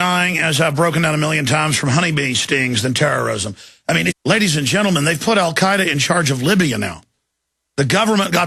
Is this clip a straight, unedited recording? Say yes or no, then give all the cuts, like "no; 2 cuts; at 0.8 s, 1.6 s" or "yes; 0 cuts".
yes; 0 cuts